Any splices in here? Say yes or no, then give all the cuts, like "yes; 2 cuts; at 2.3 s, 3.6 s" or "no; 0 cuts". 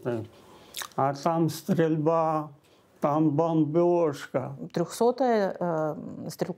yes; 1 cut; at 4.6 s